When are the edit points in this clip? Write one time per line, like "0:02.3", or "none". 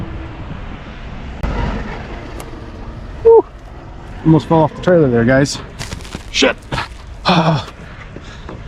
0:01.4